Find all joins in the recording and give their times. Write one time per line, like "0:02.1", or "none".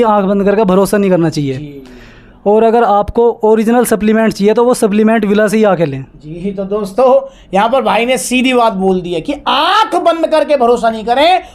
none